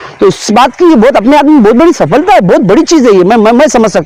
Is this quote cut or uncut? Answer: uncut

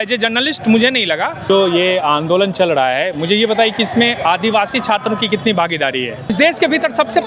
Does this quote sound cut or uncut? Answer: cut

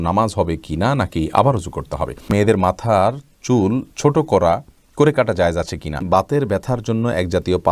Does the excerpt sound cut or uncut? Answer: cut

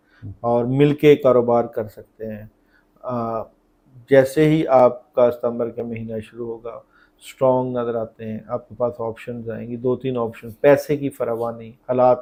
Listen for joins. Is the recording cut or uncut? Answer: uncut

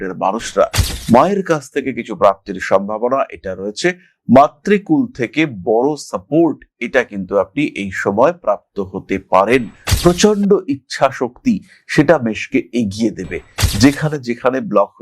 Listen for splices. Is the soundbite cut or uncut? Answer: cut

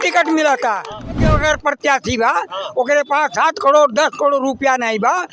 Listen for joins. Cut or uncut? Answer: cut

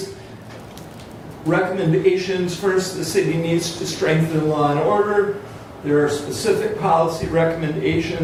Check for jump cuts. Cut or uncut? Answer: uncut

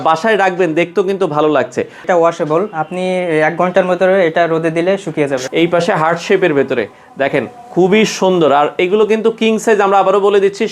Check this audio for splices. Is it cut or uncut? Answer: cut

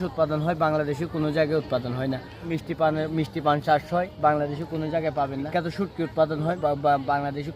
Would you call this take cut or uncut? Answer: cut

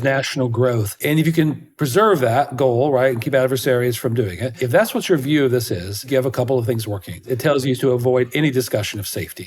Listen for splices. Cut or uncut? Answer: cut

